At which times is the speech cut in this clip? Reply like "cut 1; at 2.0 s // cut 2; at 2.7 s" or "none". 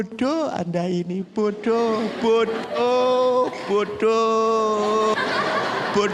none